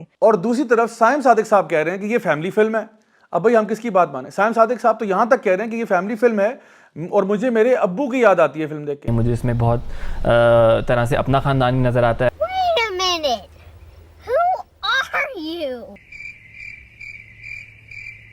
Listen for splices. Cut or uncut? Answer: cut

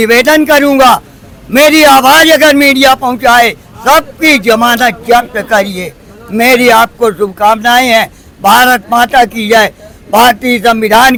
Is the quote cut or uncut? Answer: uncut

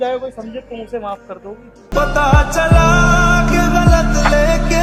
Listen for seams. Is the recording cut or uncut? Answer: uncut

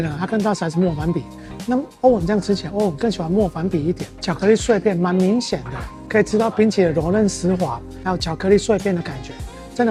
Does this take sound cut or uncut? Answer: uncut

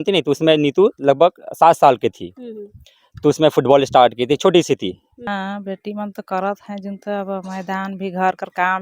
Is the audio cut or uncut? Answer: cut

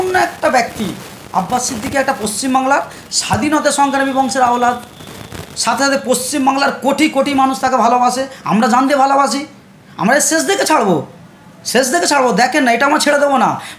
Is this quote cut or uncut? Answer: uncut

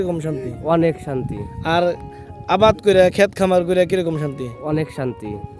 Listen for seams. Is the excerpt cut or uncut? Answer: uncut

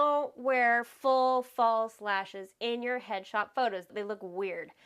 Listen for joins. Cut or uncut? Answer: uncut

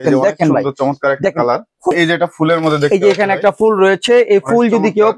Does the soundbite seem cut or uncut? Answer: cut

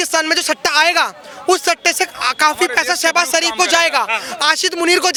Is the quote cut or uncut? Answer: uncut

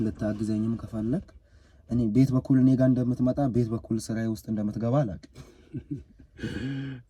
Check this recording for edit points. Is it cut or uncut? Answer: uncut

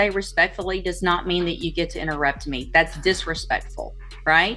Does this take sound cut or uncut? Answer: uncut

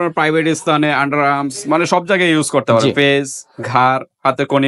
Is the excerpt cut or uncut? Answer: uncut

